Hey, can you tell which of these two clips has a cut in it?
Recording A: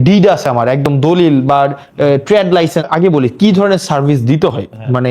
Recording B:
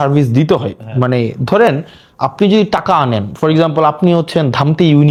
A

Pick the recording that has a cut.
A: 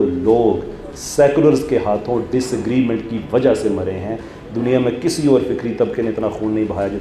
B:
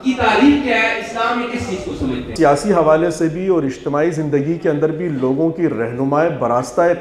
B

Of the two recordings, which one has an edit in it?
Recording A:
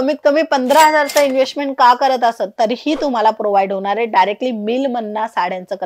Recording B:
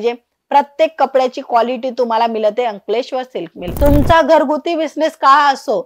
B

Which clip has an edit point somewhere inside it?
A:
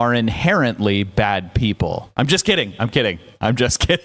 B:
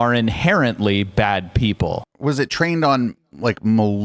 B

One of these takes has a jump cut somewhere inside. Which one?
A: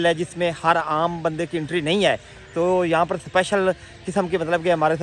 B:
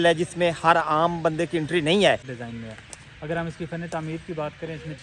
B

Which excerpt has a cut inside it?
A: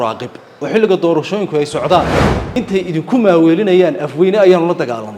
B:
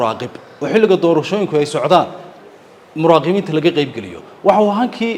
A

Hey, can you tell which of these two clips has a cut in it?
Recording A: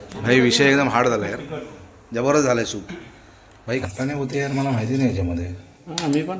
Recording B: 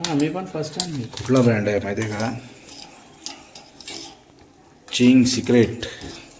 A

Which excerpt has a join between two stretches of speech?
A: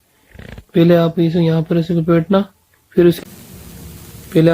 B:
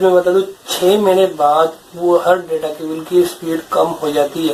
A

